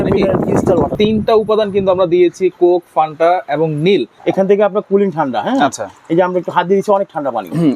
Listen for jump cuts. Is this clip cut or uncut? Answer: cut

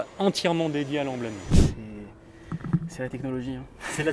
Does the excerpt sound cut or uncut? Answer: cut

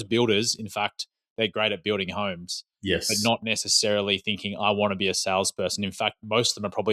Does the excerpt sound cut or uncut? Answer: uncut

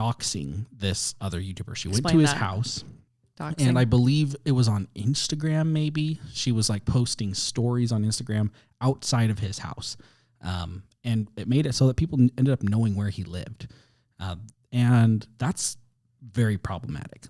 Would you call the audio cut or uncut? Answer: uncut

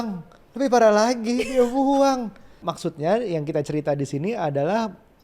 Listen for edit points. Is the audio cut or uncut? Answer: cut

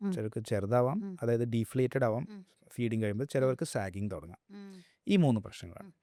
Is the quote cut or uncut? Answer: uncut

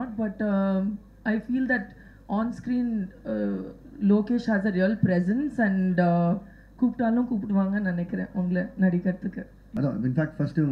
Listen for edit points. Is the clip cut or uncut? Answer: cut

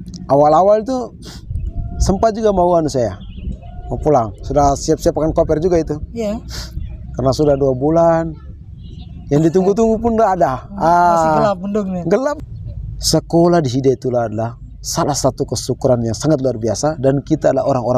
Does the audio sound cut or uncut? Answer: cut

